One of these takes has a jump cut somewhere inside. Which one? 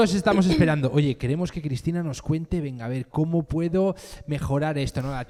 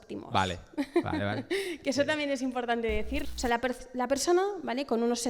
second; 1 cut; at 3.2 s

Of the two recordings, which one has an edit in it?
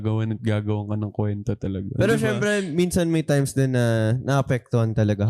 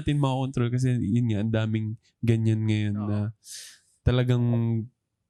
first; 1 cut; at 1.9 s

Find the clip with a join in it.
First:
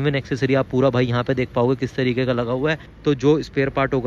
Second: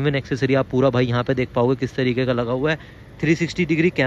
first; 1 cut; at 2.9 s

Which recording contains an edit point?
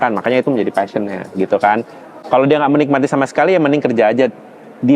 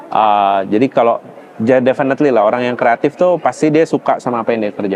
first; 1 cut; at 2.1 s

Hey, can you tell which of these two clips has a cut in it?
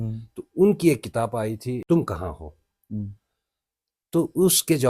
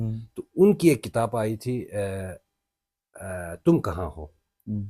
first; 1 cut; at 1.8 s

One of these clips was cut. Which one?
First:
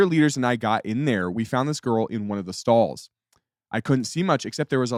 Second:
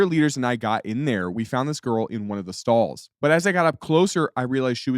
second; 1 cut; at 3.0 s

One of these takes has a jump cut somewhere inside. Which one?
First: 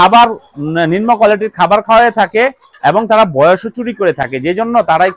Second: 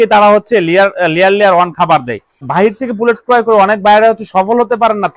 second; 1 cut; at 2.5 s

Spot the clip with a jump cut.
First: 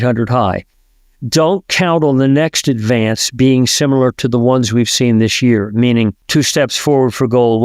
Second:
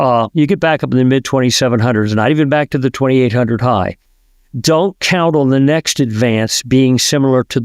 first; 1 cut; at 6.2 s

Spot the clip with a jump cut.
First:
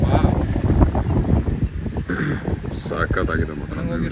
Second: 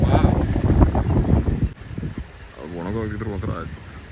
second; 1 cut; at 1.8 s

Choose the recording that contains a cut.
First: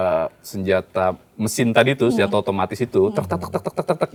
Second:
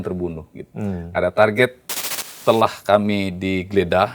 second; 1 cut; at 2.2 s

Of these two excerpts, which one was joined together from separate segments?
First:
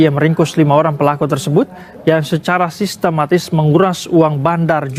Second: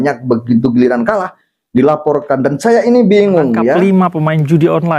second; 1 cut; at 3.8 s

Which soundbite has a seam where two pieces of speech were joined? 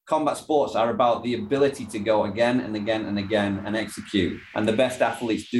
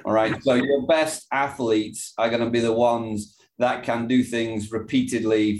first; 1 cut; at 4.4 s

